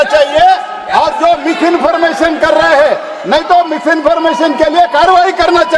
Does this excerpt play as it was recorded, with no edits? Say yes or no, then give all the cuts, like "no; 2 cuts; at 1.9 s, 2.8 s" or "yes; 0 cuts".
yes; 0 cuts